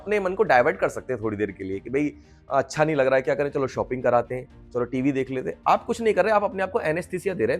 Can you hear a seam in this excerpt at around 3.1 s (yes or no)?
no